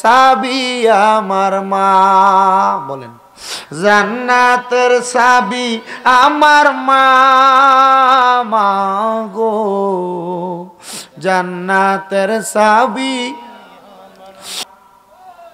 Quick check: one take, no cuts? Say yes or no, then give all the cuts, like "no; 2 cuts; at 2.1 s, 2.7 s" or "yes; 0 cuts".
no; 1 cut; at 14.6 s